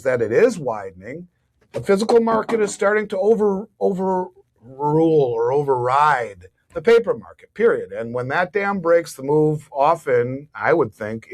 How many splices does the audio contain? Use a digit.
0